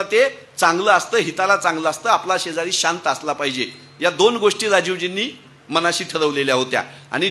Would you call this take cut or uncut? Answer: uncut